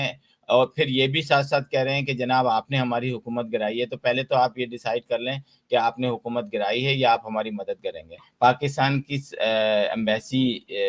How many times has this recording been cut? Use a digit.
1